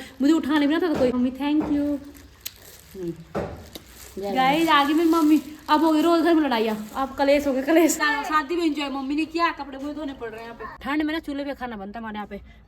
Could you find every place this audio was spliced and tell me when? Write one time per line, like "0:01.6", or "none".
0:01.1
0:08.1
0:10.7

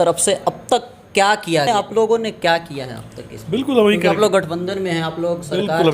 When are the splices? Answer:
0:01.7

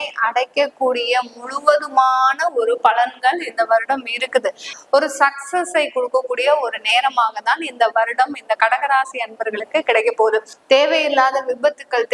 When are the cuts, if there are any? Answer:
0:04.7
0:10.5

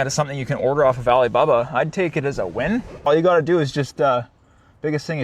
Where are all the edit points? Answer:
0:03.1

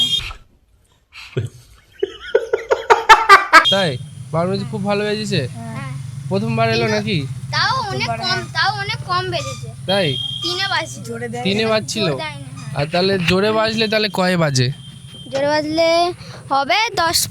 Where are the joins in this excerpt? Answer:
0:03.7

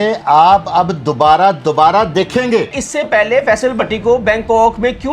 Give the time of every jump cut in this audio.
0:02.8

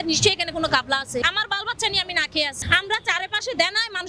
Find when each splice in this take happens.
0:01.2
0:02.6

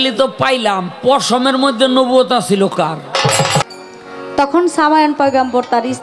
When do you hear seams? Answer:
0:03.6

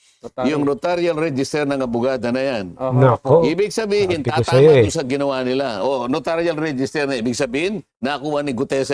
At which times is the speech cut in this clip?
none

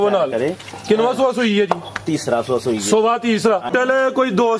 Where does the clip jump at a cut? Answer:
0:03.7

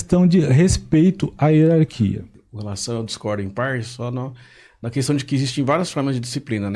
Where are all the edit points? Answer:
0:02.3

